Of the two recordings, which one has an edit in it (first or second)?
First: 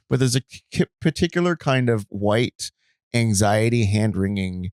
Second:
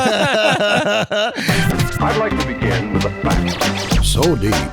second